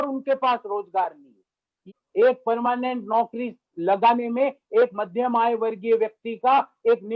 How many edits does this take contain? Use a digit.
1